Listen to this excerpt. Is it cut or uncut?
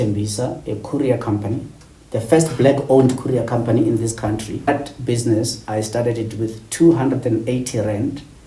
cut